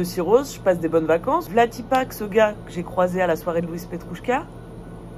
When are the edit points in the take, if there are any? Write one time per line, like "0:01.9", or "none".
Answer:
0:01.5